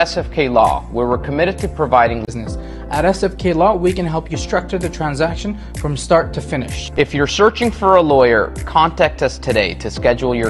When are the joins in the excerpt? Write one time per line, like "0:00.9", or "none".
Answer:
0:02.3